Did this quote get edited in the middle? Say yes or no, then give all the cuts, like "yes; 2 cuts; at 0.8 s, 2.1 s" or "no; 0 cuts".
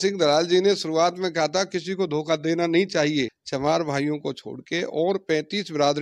yes; 1 cut; at 3.4 s